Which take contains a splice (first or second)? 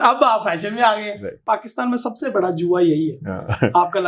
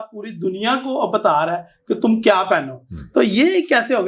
first